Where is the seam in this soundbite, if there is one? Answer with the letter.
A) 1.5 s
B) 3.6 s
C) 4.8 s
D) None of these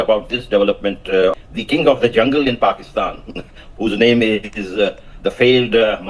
A